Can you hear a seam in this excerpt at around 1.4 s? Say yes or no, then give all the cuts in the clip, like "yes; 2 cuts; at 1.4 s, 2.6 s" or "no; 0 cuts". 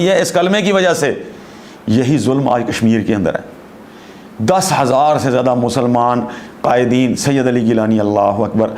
no; 0 cuts